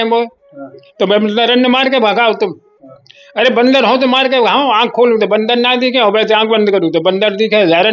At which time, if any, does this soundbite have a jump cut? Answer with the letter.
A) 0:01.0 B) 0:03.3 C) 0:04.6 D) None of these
D